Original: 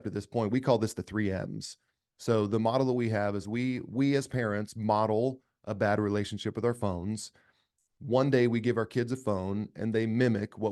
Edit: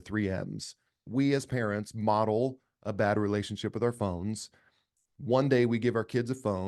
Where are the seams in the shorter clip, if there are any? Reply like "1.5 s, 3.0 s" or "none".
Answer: 1.0 s